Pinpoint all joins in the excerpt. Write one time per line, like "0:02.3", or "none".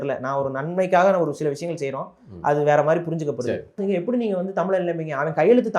0:03.8